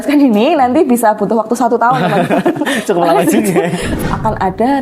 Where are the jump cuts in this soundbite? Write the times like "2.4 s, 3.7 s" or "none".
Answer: 3.9 s